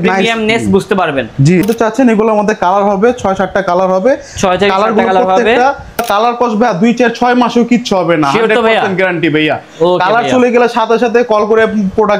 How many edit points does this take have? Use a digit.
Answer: 2